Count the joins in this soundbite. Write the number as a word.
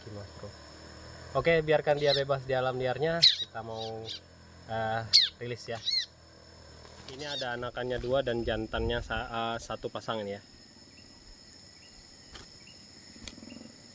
one